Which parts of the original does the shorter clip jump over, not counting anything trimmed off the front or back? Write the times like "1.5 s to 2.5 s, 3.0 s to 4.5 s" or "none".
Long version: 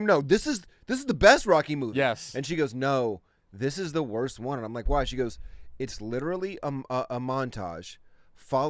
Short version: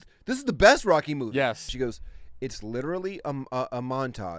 2.3 s to 5.1 s

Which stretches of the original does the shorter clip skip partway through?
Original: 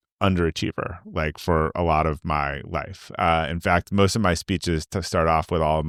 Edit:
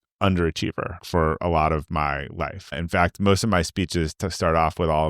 1.0 s to 1.4 s, 3.1 s to 3.5 s

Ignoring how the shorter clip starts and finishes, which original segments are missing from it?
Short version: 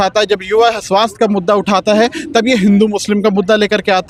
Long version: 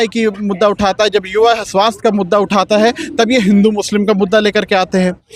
none

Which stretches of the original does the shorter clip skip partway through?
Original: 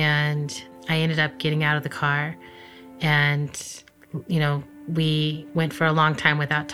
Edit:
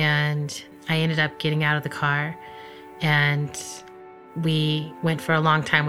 4.2 s to 4.7 s

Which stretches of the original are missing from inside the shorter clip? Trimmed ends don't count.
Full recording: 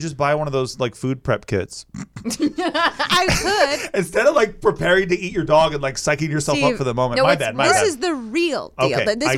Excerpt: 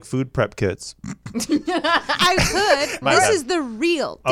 3.9 s to 7.5 s

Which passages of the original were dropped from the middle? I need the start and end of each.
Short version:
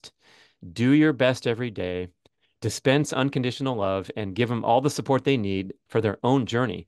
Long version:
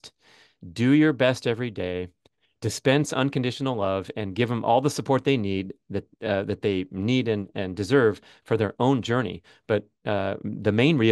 5.8 s to 8.3 s

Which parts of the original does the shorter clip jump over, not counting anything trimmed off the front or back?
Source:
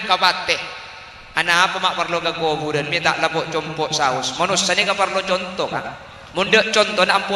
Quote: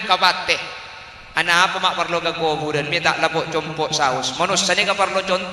none

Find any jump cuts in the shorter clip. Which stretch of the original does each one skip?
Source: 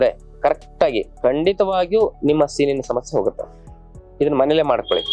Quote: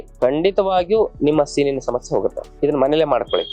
3.5 s to 4.0 s

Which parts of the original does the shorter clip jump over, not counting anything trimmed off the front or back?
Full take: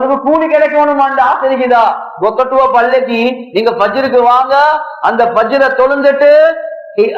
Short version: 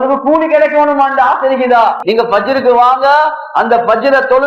2.0 s to 3.5 s

